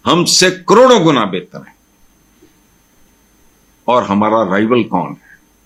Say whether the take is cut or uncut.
uncut